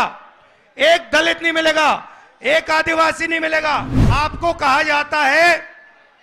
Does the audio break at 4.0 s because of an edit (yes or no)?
yes